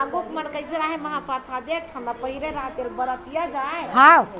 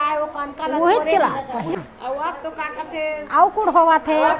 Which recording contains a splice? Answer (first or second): second